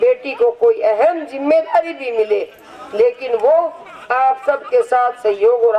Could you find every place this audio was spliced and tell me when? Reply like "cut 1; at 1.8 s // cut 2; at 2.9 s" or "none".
none

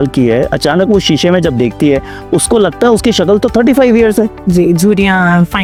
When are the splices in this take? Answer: none

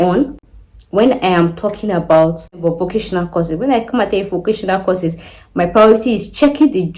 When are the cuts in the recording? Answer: cut 1; at 2.6 s

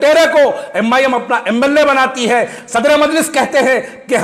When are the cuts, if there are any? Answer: none

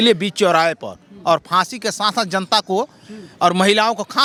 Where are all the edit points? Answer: none

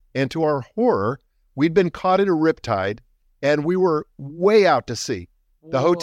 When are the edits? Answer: none

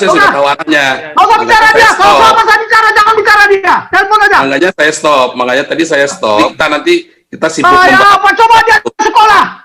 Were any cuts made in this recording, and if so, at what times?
cut 1; at 6.5 s

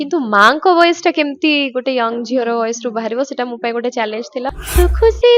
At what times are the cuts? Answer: cut 1; at 4.5 s

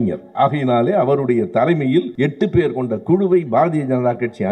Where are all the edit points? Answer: cut 1; at 2.1 s

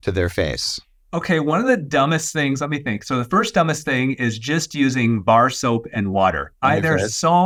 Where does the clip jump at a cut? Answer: none

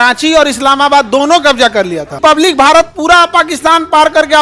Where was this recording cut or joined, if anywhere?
cut 1; at 2.2 s

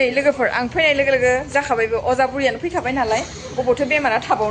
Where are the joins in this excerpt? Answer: none

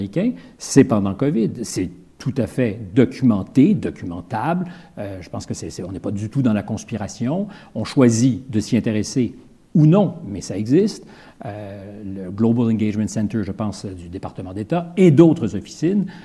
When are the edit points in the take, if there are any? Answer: none

